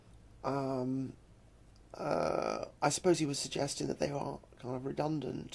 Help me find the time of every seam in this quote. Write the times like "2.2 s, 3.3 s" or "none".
2.7 s